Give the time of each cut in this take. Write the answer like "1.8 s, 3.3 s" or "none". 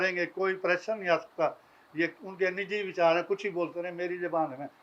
none